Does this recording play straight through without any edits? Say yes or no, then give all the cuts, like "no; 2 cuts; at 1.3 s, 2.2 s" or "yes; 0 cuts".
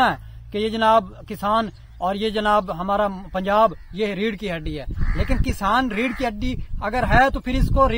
yes; 0 cuts